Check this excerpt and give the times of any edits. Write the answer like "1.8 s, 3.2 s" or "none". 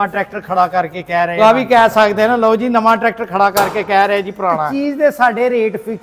1.4 s, 4.7 s